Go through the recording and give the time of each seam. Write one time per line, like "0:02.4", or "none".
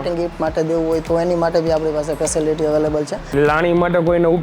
0:03.3